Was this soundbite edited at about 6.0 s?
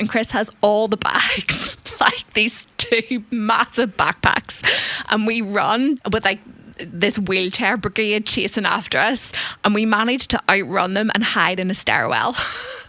yes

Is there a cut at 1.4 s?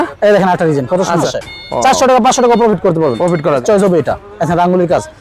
yes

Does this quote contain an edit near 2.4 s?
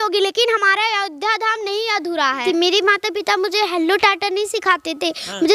yes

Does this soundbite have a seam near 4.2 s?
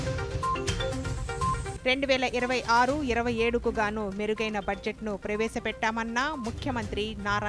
no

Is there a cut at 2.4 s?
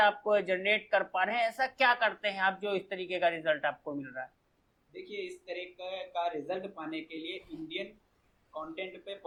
no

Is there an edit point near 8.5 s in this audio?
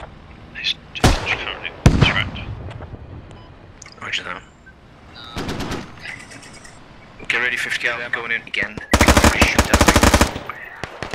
yes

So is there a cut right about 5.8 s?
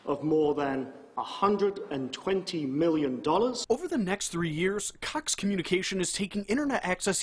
no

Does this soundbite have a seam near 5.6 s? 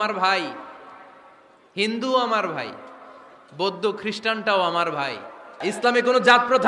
yes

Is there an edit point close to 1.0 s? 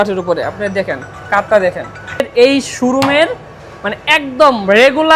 no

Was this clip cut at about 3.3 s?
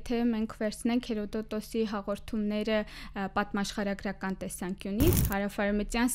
no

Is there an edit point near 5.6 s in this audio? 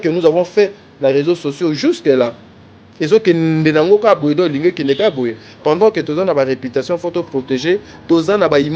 no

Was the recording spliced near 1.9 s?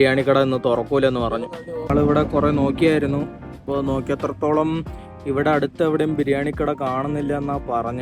yes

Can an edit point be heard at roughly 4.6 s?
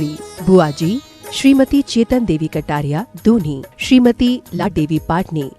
yes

